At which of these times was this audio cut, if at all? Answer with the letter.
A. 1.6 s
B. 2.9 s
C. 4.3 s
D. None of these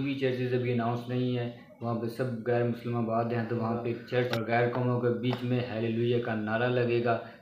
C